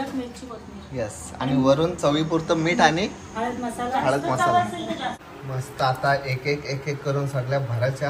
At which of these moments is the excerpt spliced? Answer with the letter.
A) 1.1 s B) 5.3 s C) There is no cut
B